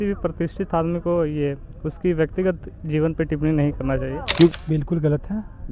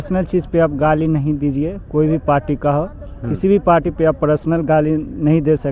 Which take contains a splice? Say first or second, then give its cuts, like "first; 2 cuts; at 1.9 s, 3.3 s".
first; 1 cut; at 4.5 s